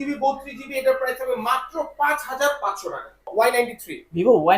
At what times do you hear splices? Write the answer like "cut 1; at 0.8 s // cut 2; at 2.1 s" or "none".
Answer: cut 1; at 3.2 s